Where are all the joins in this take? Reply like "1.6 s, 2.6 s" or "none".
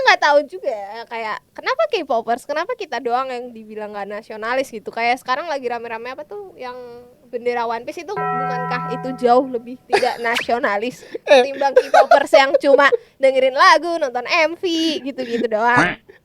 none